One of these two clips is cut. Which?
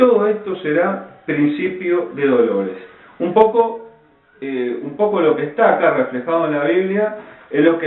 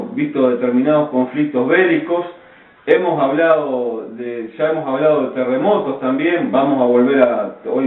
first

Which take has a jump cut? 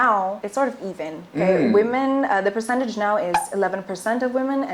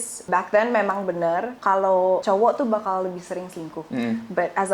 second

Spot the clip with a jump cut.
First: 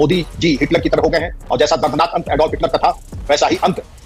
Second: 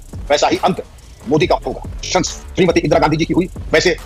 second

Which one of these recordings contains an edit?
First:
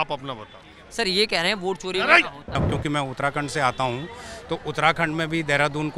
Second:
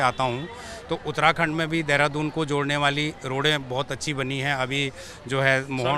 first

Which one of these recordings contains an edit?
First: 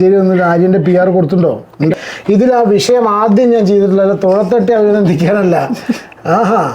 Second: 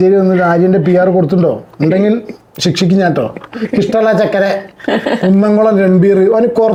first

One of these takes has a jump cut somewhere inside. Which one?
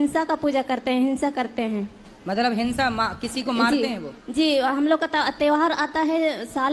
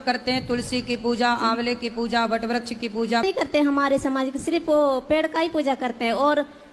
second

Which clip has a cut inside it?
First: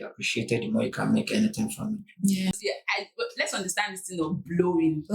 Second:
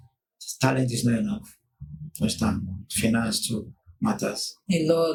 first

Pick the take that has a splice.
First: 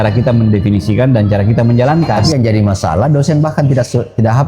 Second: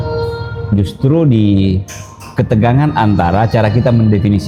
first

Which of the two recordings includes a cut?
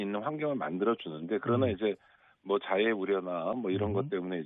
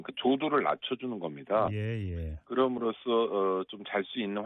second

